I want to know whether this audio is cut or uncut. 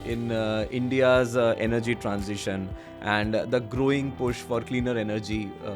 cut